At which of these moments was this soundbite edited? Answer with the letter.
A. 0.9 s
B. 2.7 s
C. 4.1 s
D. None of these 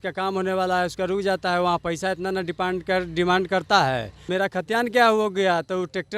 C